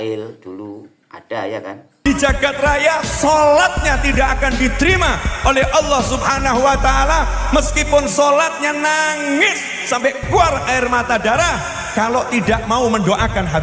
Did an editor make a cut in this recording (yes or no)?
yes